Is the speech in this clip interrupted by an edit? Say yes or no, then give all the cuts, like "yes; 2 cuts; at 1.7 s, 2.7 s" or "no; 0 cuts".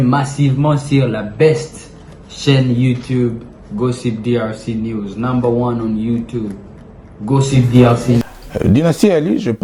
yes; 1 cut; at 8.2 s